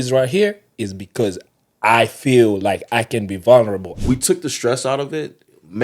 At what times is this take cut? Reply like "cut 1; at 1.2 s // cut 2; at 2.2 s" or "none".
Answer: cut 1; at 3.9 s